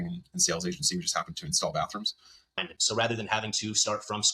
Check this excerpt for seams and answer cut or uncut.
cut